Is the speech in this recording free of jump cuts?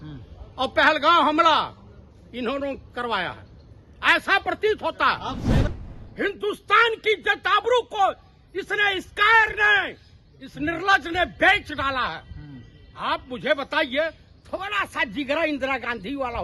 no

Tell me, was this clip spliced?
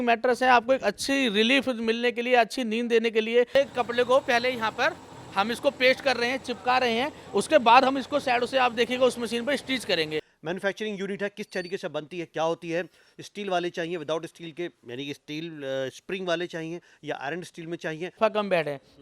yes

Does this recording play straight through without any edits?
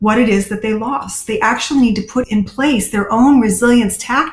no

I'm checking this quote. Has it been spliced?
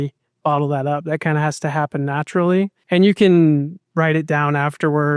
yes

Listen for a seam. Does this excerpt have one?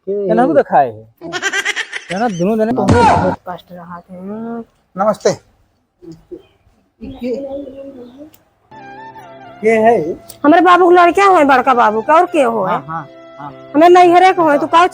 yes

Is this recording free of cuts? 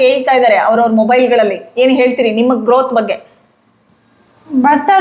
yes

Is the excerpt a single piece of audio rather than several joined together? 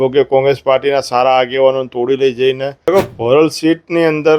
no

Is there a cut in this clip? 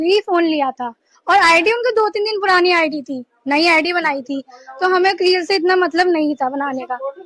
no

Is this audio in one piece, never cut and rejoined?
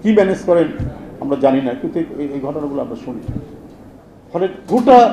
yes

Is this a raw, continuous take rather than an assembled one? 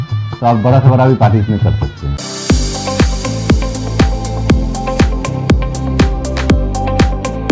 no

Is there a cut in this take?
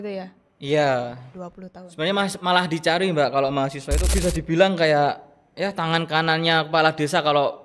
yes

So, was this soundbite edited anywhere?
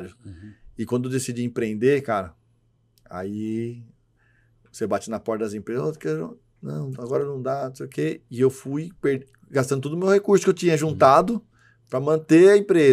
no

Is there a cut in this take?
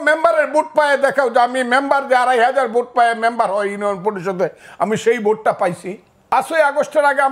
yes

